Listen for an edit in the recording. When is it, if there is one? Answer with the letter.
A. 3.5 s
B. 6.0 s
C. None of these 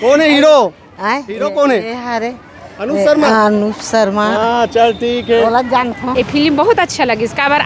B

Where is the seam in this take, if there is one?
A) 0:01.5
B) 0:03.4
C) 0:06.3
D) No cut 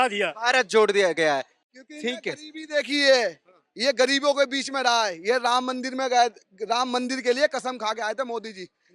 A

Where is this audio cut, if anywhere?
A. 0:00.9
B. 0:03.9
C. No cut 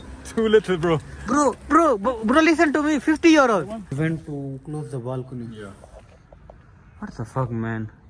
B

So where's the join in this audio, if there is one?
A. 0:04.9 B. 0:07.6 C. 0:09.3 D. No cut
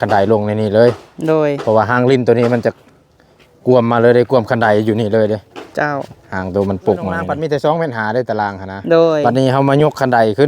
B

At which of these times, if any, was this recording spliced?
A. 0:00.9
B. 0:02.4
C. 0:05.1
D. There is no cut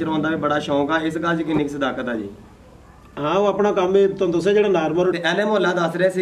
C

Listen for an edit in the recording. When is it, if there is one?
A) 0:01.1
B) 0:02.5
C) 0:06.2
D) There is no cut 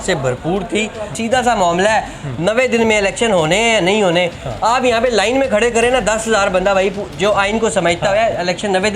A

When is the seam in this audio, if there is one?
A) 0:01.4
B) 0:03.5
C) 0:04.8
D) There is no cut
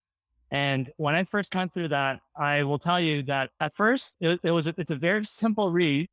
D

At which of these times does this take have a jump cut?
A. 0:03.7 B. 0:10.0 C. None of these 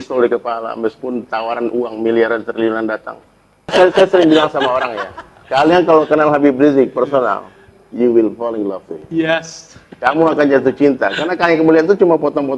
A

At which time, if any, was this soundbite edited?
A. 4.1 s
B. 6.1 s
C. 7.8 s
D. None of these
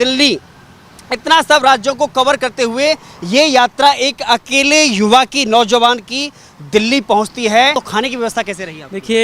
C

